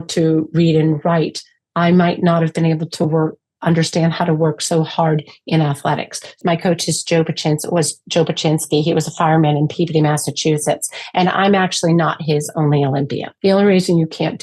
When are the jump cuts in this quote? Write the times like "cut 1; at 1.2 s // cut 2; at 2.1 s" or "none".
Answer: cut 1; at 6.4 s // cut 2; at 13.3 s